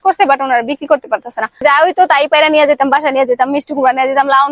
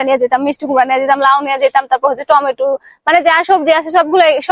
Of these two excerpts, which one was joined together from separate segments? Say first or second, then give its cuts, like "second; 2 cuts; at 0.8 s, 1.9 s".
first; 1 cut; at 1.6 s